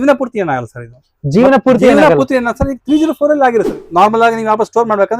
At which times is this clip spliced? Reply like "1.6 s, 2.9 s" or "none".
3.8 s